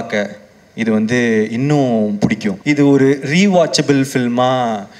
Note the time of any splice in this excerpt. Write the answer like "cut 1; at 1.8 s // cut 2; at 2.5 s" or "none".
cut 1; at 2.5 s